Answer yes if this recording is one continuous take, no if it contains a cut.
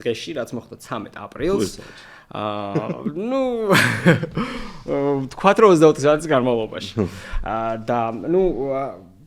yes